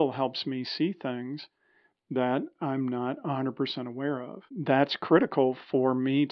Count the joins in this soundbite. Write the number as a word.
one